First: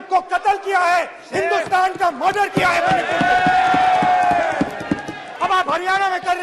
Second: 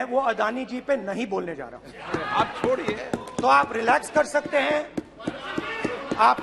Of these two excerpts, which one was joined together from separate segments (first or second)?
first